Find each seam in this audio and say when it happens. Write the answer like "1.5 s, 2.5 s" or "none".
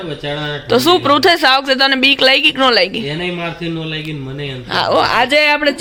none